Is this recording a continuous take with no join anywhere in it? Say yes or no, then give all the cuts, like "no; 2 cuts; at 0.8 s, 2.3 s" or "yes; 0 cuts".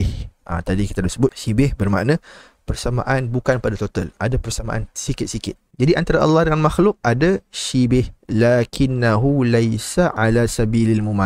yes; 0 cuts